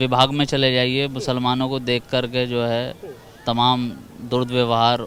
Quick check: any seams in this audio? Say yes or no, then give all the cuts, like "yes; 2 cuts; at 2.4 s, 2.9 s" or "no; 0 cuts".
no; 0 cuts